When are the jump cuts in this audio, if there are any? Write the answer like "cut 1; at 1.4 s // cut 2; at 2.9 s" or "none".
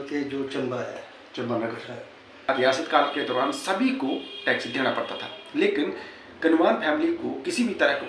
cut 1; at 2.5 s